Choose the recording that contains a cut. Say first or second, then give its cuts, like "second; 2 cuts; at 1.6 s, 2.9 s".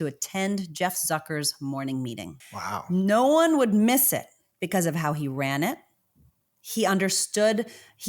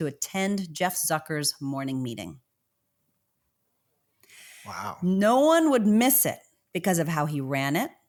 first; 1 cut; at 2.4 s